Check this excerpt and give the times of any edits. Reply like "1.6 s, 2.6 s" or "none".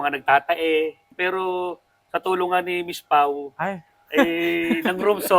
1.1 s